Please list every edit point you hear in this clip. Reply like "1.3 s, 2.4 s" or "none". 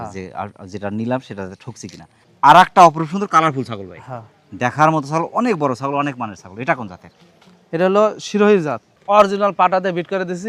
2.2 s, 8.9 s